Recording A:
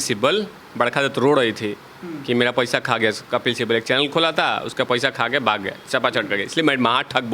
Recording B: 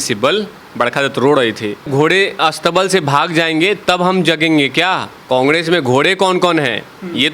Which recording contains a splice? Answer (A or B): B